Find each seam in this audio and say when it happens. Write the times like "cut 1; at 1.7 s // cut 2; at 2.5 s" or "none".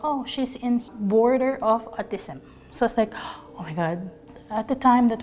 cut 1; at 0.9 s // cut 2; at 4.3 s